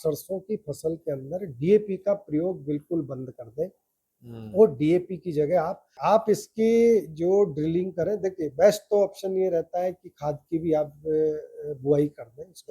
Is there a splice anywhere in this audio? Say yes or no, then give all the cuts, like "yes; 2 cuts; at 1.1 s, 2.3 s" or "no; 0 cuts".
yes; 1 cut; at 6.0 s